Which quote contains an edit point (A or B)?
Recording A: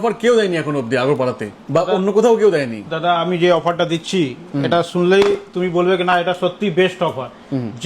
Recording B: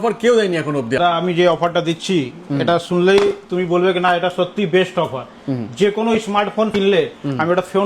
B